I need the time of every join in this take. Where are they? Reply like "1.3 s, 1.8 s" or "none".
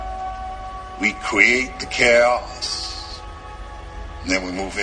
3.1 s